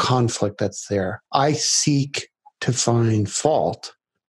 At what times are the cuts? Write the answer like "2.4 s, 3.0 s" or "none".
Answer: 1.2 s